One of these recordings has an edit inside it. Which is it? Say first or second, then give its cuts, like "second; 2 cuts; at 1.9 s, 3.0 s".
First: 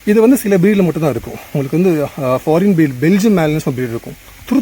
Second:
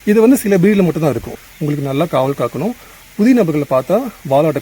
second; 1 cut; at 1.4 s